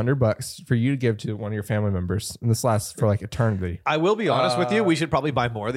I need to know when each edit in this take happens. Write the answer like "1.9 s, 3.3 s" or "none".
3.8 s